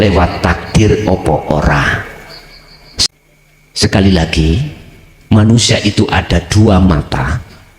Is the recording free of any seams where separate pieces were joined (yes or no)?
no